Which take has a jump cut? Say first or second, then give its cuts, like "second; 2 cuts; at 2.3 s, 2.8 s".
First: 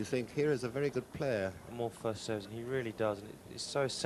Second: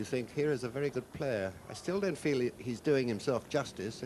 second; 1 cut; at 1.6 s